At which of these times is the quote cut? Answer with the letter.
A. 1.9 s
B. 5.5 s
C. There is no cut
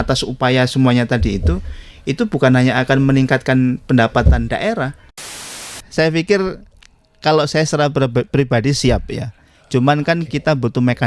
B